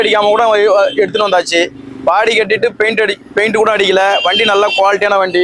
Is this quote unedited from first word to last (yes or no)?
yes